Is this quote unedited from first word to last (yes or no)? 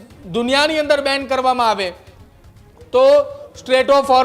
yes